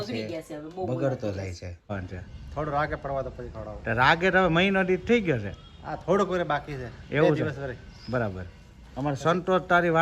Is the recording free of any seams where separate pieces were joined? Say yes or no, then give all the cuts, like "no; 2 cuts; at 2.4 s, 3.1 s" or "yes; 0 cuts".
no; 1 cut; at 1.9 s